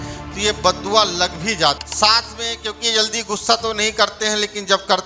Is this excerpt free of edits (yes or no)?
no